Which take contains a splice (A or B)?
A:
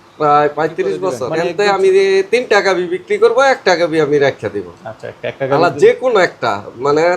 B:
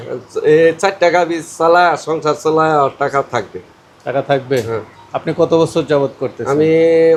A